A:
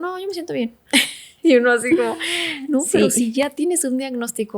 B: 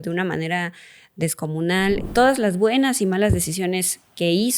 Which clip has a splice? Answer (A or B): B